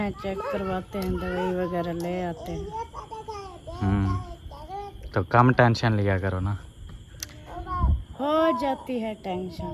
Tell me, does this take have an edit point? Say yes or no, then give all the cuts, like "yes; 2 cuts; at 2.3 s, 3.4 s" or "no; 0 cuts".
no; 0 cuts